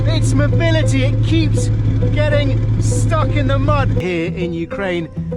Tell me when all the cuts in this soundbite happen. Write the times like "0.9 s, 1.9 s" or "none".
4.0 s